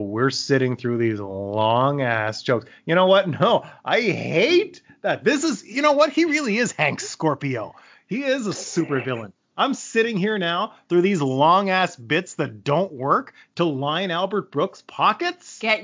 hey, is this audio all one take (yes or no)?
yes